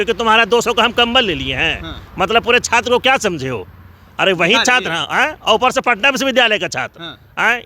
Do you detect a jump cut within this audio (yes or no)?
no